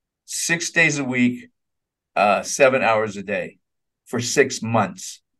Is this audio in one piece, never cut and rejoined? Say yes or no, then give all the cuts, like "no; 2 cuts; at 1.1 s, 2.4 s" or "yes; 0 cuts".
yes; 0 cuts